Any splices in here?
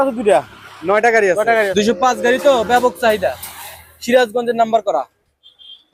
yes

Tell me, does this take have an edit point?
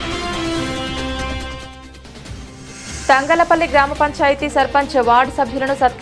yes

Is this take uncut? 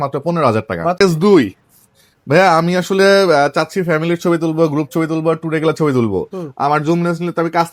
yes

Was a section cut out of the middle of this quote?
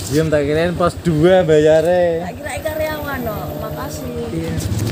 no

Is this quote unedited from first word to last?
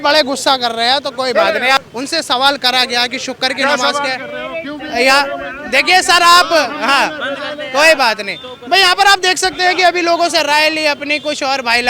no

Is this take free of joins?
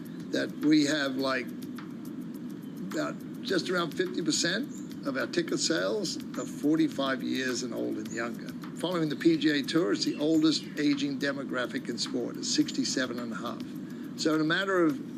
yes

